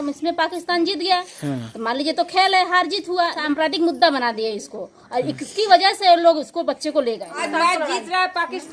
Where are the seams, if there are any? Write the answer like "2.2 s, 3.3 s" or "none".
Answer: 3.4 s, 7.4 s